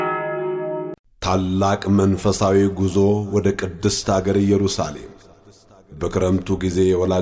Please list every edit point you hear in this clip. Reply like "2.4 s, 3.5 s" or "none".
1.0 s